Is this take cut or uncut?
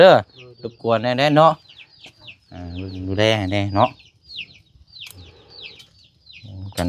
uncut